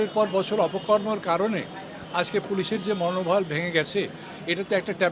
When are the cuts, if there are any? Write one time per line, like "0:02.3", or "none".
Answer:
none